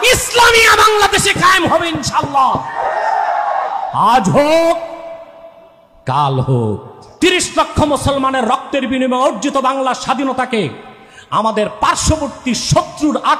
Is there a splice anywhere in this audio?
yes; 1 cut; at 7.0 s

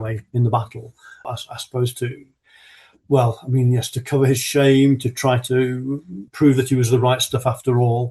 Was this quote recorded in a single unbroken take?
no; 2 cuts; at 1.3 s, 6.3 s

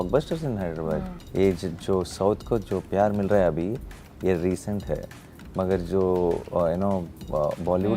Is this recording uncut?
no; 1 cut; at 1.2 s

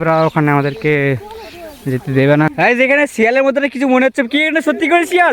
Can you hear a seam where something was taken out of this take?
yes; 1 cut; at 2.5 s

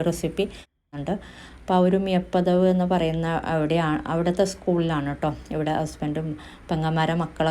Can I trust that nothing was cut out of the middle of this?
no; 1 cut; at 1.0 s

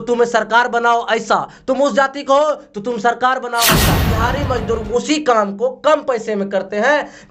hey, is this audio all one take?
no; 1 cut; at 4.0 s

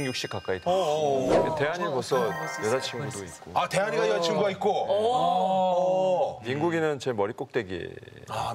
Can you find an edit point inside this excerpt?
yes; 1 cut; at 1.5 s

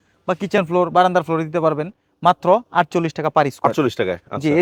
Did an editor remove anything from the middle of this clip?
no; 0 cuts

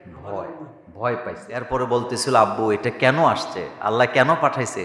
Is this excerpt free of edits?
no; 1 cut; at 1.7 s

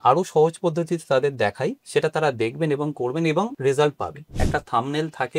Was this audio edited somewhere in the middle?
yes; 3 cuts; at 1.8 s, 3.5 s, 4.3 s

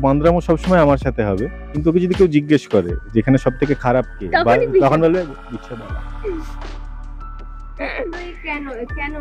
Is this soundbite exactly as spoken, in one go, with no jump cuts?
yes; 0 cuts

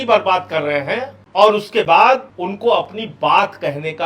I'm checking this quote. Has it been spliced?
yes; 2 cuts; at 1.2 s, 2.3 s

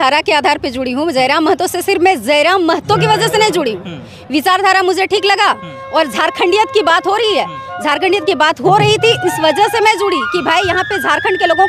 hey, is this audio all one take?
yes; 0 cuts

